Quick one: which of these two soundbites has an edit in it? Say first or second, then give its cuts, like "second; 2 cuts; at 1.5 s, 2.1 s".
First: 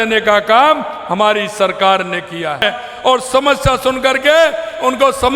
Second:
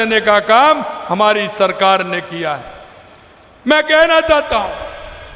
first; 1 cut; at 2.6 s